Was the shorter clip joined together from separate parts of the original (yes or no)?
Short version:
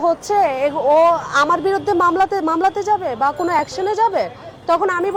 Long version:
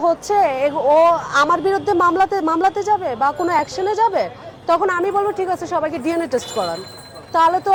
no